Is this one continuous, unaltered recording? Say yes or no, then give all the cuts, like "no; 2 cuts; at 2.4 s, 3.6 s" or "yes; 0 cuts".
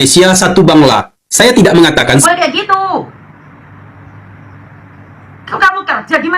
no; 1 cut; at 2.2 s